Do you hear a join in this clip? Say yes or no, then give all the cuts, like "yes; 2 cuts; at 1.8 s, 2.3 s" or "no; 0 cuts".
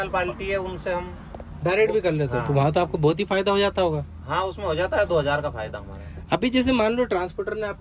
no; 0 cuts